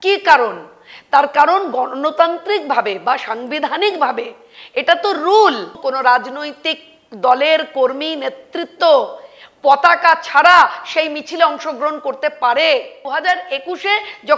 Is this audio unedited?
no; 2 cuts; at 5.7 s, 13.0 s

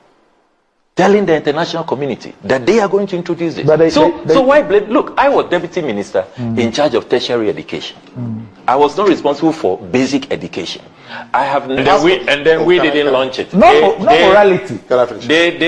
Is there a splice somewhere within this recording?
yes; 1 cut; at 11.7 s

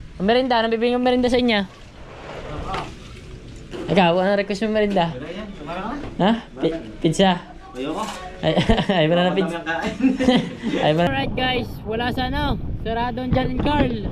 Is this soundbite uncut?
no; 1 cut; at 11.1 s

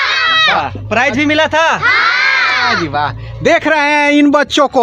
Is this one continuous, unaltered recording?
yes; 0 cuts

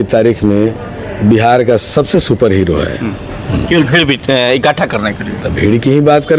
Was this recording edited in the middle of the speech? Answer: no; 0 cuts

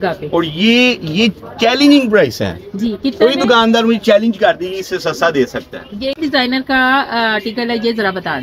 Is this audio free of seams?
no; 1 cut; at 6.2 s

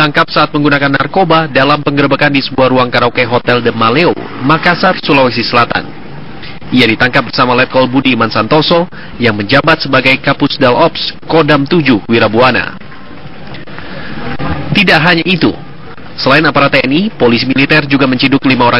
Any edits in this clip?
no; 0 cuts

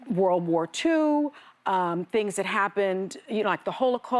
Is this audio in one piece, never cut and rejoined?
yes; 0 cuts

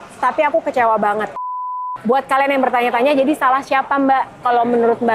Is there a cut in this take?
yes; 1 cut; at 1.7 s

